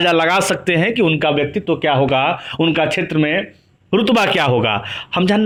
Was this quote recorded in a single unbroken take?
yes; 0 cuts

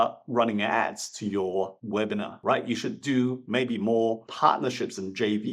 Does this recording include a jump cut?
no; 0 cuts

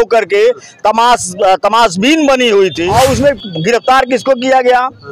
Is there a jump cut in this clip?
yes; 1 cut; at 2.8 s

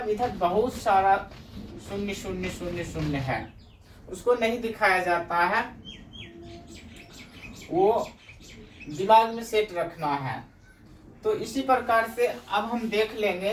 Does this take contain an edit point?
no; 0 cuts

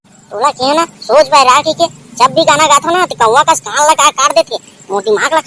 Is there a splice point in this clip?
no; 0 cuts

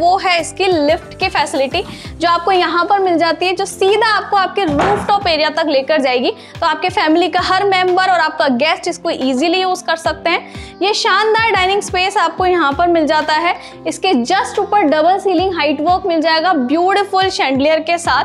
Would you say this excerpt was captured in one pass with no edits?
yes; 0 cuts

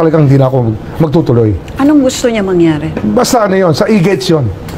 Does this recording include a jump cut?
no; 0 cuts

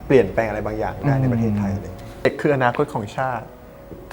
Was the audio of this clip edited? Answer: yes; 1 cut; at 2.3 s

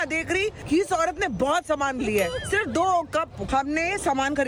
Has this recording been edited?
yes; 1 cut; at 3.5 s

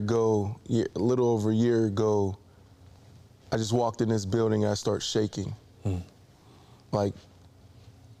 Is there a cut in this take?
no; 0 cuts

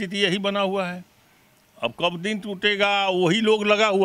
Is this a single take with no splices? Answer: yes; 0 cuts

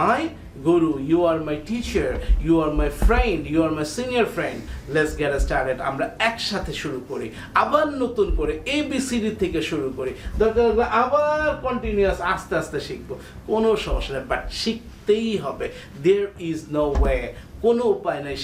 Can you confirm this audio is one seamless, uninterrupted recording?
yes; 0 cuts

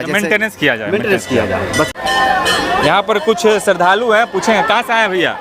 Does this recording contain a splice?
no; 0 cuts

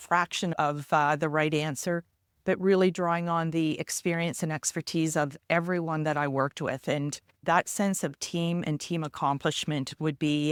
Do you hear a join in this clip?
no; 0 cuts

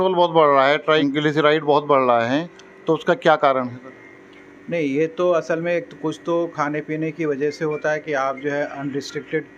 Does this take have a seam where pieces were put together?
yes; 1 cut; at 1.0 s

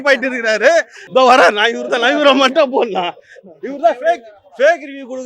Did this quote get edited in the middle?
yes; 1 cut; at 1.0 s

